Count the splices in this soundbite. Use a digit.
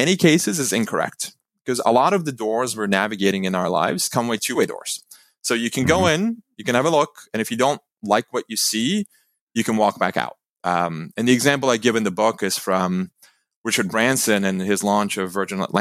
1